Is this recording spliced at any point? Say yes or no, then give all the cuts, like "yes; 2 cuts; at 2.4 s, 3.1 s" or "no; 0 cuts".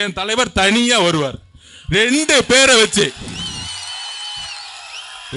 no; 0 cuts